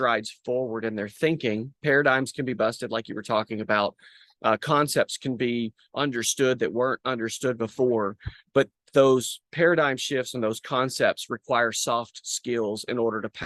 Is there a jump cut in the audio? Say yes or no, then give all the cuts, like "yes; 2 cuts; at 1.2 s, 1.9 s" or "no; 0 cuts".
no; 0 cuts